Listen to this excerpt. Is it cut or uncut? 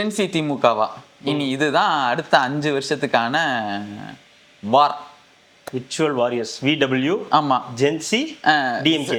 uncut